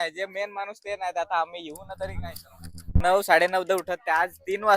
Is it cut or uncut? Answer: cut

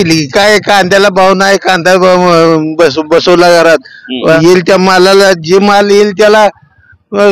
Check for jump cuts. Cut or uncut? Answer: cut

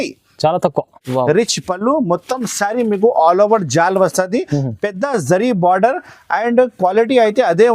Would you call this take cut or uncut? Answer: cut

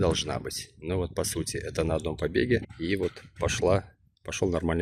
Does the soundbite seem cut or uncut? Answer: cut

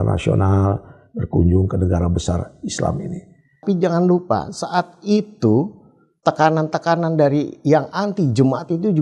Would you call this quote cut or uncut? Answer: cut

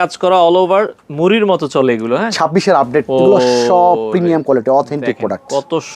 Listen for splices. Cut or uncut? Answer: cut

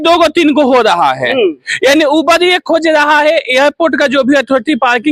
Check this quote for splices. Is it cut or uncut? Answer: uncut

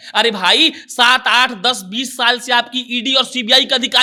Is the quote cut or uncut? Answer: uncut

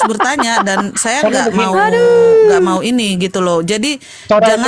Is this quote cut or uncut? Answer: uncut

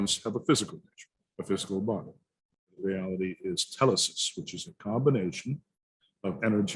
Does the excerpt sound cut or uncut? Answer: cut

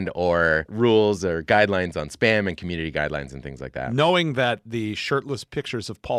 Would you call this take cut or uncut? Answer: uncut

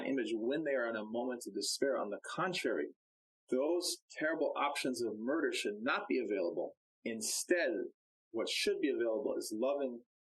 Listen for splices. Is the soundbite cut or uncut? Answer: cut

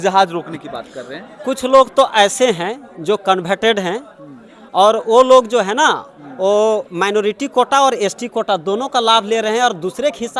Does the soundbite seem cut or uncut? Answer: uncut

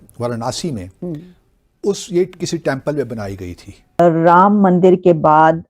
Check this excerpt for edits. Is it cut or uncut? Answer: cut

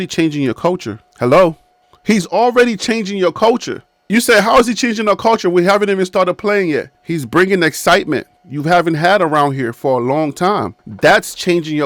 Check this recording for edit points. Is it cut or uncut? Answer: uncut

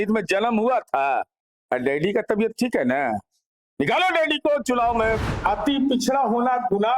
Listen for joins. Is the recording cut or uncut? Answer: cut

